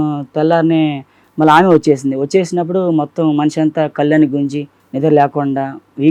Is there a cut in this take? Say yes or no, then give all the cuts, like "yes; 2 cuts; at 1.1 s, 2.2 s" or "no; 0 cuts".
no; 0 cuts